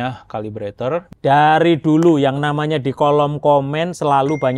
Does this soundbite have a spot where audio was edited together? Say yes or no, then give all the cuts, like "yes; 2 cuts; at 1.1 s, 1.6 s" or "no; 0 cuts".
yes; 1 cut; at 1.1 s